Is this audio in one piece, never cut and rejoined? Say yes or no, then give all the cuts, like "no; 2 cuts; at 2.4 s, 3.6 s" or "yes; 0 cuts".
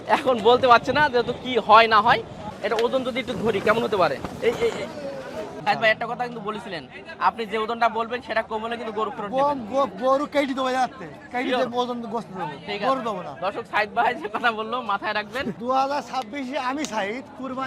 no; 3 cuts; at 2.4 s, 5.5 s, 15.6 s